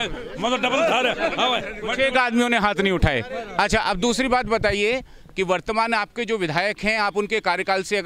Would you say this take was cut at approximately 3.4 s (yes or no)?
no